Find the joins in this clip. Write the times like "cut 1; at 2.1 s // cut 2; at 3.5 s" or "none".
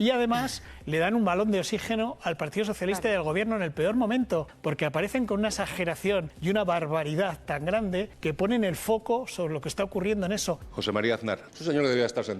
cut 1; at 4.5 s // cut 2; at 6.3 s // cut 3; at 8.1 s // cut 4; at 10.7 s // cut 5; at 11.5 s